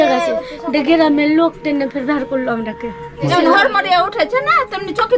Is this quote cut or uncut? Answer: cut